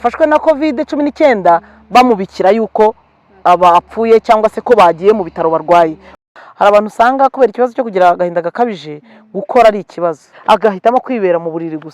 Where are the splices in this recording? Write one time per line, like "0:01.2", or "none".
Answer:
0:06.2
0:10.3

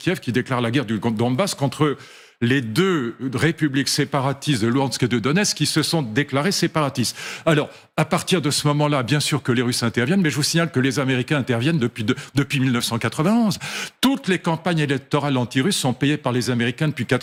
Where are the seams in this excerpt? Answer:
none

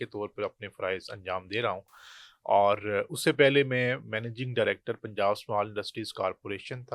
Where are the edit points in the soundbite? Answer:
none

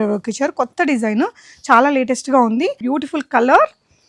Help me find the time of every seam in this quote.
0:02.8

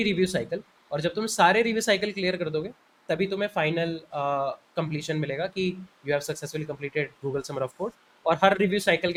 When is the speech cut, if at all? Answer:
none

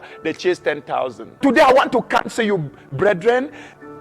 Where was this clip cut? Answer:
0:01.4

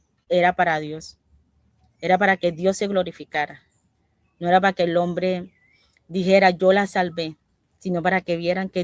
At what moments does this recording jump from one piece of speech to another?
none

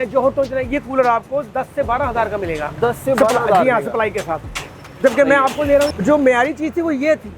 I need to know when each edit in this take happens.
0:05.9

